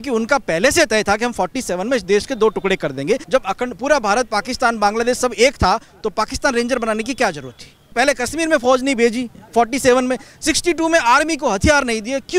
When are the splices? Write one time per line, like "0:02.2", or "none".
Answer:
0:03.2
0:07.9